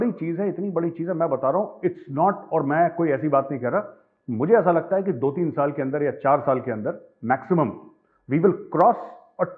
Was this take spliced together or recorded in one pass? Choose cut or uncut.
uncut